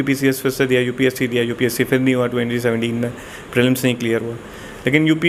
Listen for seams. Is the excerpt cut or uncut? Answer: uncut